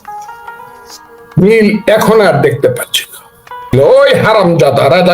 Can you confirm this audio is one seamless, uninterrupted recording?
no; 1 cut; at 3.7 s

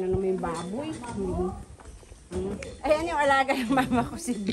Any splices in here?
no; 0 cuts

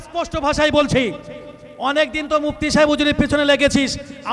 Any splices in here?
no; 0 cuts

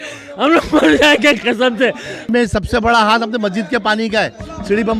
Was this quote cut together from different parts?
yes; 1 cut; at 2.3 s

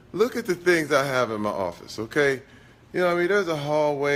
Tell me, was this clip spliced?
no; 0 cuts

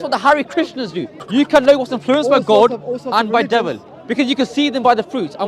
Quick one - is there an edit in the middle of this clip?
yes; 1 cut; at 1.2 s

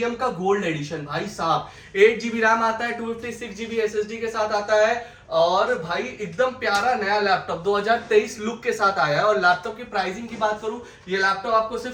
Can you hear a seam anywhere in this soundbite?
no; 0 cuts

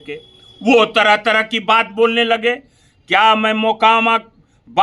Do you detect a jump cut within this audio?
no; 0 cuts

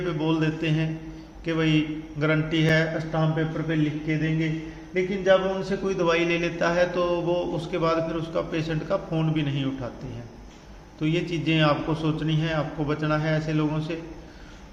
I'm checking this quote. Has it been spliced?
no; 0 cuts

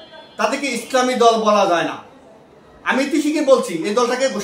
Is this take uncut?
yes; 0 cuts

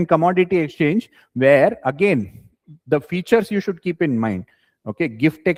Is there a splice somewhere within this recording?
no; 0 cuts

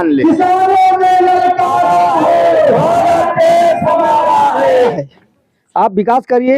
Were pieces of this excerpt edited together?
yes; 1 cut; at 4.9 s

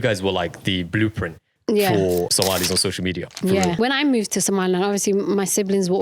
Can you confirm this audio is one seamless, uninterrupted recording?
no; 2 cuts; at 2.3 s, 3.8 s

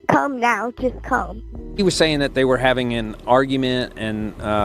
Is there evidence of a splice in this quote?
yes; 1 cut; at 1.8 s

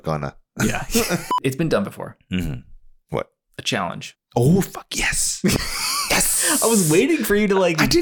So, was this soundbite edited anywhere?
yes; 2 cuts; at 1.3 s, 4.1 s

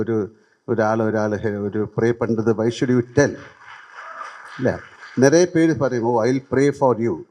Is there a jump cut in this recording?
no; 0 cuts

